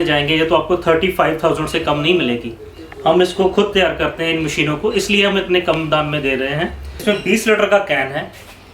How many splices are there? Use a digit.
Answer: 1